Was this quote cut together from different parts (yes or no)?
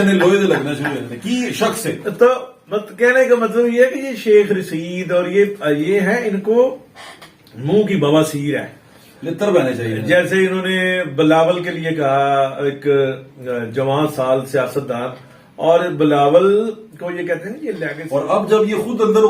yes